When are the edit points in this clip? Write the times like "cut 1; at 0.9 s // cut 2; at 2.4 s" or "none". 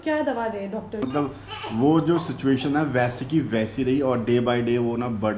cut 1; at 1.1 s